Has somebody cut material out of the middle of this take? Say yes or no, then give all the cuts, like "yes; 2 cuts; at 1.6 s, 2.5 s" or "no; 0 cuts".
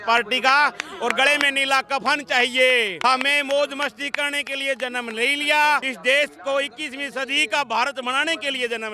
yes; 2 cuts; at 2.9 s, 5.9 s